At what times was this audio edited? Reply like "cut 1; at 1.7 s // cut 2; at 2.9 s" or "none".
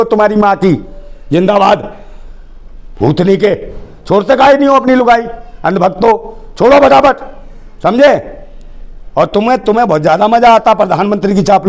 none